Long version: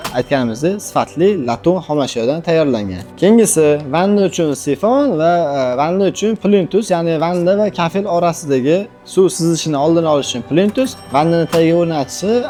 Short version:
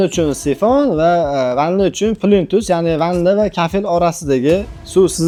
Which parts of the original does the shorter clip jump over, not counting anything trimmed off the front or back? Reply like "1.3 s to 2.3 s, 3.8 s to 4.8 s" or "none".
none